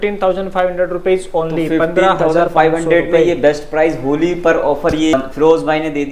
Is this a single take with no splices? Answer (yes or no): no